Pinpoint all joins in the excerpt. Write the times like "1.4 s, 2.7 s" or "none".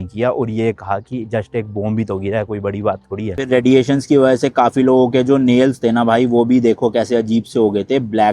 3.4 s